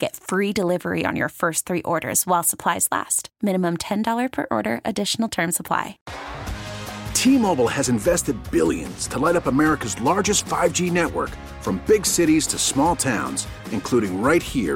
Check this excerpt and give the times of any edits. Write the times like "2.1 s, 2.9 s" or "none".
6.0 s